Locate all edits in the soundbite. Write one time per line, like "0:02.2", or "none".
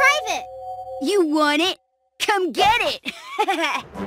none